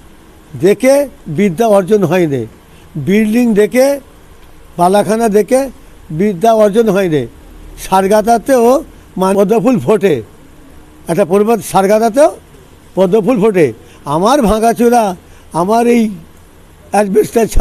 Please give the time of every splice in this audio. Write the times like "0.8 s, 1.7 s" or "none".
9.3 s